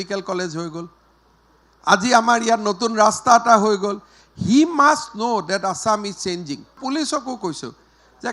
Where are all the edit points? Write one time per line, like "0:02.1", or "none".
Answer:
0:06.8